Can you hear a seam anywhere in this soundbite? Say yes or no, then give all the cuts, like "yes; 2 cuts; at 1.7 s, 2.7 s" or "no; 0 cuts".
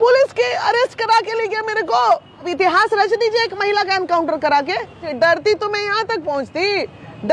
yes; 2 cuts; at 2.5 s, 5.1 s